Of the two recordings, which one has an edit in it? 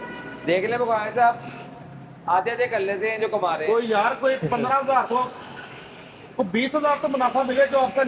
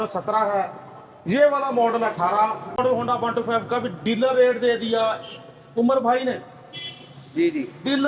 second; 1 cut; at 2.8 s

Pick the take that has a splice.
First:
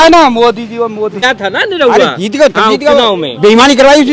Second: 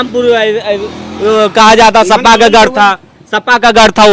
first; 1 cut; at 1.2 s

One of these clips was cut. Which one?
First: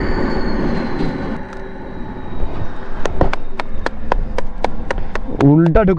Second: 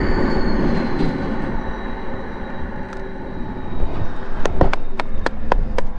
first; 1 cut; at 1.4 s

